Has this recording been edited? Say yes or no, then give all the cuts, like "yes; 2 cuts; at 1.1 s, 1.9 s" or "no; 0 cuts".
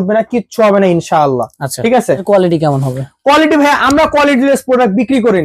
yes; 1 cut; at 2.2 s